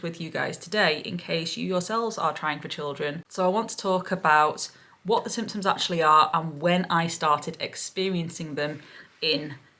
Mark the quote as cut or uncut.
cut